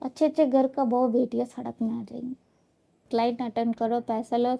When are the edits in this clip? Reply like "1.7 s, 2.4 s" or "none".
3.0 s